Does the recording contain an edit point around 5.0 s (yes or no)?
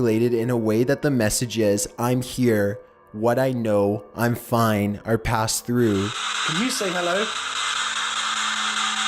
yes